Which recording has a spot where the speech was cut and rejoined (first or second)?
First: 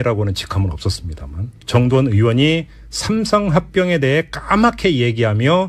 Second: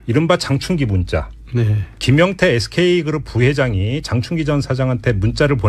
second